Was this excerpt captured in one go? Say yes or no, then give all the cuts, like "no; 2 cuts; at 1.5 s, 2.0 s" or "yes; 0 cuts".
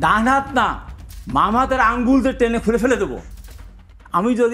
yes; 0 cuts